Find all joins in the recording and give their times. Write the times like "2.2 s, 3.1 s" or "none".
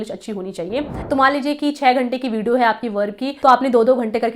1.0 s, 3.3 s